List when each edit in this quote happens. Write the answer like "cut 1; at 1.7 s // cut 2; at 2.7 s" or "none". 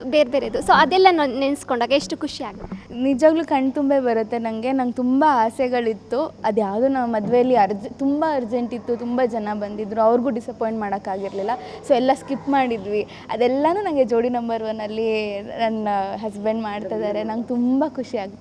none